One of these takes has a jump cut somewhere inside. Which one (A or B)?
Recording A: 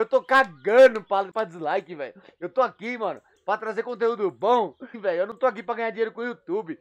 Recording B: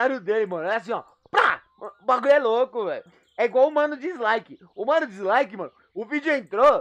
A